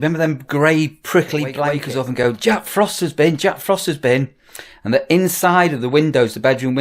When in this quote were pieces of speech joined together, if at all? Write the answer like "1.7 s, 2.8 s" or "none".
1.8 s